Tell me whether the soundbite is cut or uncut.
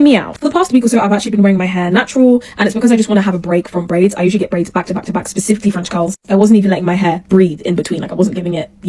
uncut